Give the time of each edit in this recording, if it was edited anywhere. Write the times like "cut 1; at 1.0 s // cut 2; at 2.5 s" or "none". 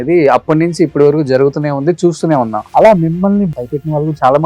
cut 1; at 2.6 s // cut 2; at 3.5 s